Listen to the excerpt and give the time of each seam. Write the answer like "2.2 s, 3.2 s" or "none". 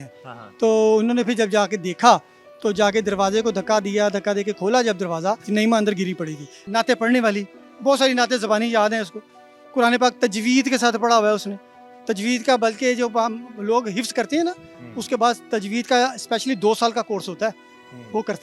5.4 s, 6.6 s